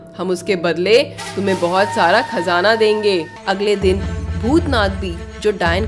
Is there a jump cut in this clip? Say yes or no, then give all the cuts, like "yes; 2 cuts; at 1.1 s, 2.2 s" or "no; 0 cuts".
yes; 1 cut; at 3.3 s